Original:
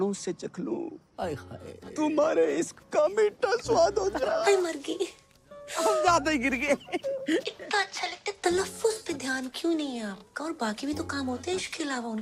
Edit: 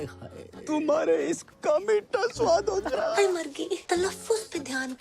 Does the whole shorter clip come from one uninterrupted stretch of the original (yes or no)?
no